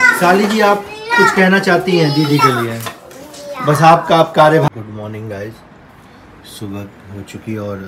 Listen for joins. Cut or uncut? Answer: cut